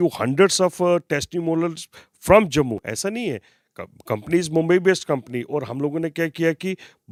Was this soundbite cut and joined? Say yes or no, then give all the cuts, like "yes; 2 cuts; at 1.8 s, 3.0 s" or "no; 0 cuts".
no; 0 cuts